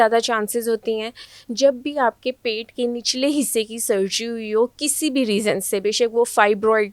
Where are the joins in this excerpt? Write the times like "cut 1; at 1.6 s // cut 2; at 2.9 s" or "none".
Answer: none